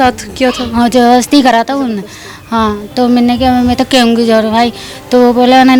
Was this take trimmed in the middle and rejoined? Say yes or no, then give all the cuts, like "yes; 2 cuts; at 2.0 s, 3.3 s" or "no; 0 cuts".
no; 0 cuts